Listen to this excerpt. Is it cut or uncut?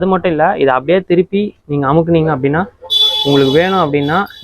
uncut